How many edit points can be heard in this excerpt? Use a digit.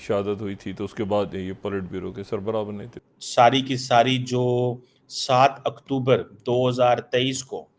1